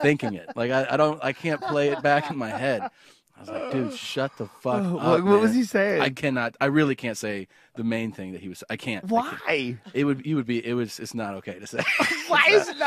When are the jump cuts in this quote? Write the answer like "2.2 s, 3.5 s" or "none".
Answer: 3.7 s